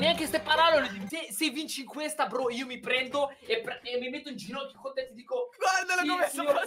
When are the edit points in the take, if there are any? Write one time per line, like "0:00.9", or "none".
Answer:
0:01.1